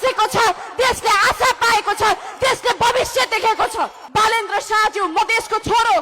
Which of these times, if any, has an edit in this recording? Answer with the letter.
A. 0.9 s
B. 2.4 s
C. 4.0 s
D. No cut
C